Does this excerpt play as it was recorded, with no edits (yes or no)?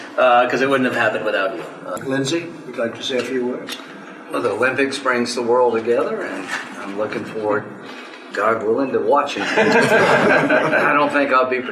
no